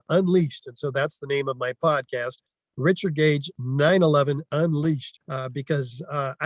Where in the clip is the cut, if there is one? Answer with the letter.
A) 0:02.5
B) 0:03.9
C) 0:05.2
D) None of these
C